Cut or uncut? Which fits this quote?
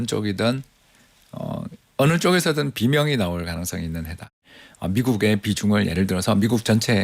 cut